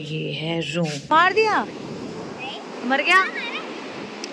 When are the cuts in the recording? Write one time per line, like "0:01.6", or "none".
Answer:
0:01.0